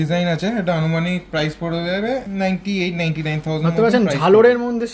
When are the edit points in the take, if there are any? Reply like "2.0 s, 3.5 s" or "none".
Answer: 2.2 s